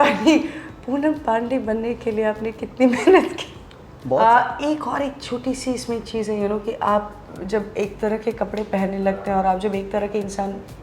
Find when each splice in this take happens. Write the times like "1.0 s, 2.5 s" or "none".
4.2 s